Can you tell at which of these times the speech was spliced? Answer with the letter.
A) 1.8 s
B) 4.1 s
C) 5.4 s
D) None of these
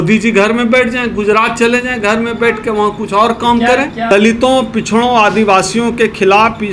B